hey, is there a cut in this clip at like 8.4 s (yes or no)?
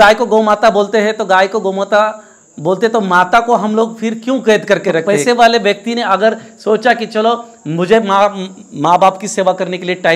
no